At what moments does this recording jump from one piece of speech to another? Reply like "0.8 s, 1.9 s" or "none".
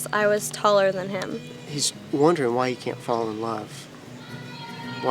1.4 s